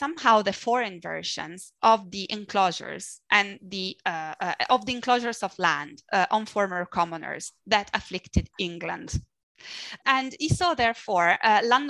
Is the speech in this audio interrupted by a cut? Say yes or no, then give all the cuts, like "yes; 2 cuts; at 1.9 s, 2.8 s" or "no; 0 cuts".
no; 0 cuts